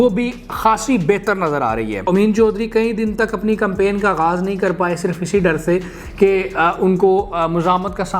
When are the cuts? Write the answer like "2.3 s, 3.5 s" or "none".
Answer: 2.0 s